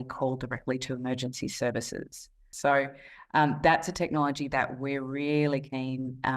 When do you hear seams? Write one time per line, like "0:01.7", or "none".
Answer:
0:02.4